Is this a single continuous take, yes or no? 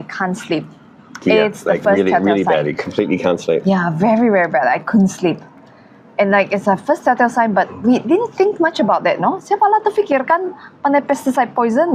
yes